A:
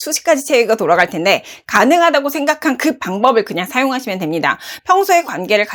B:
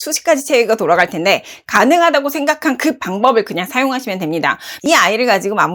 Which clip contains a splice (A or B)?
B